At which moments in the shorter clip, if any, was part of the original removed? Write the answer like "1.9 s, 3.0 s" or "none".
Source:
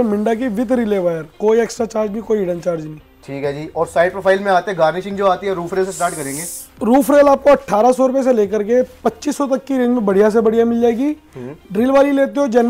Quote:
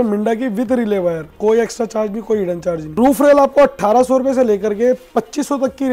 2.9 s